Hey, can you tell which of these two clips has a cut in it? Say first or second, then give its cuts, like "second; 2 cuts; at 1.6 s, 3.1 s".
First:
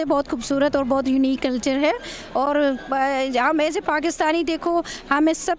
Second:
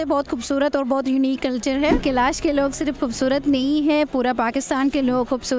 second; 1 cut; at 2.0 s